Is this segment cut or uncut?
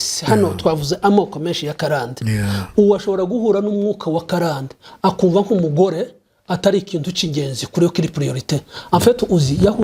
uncut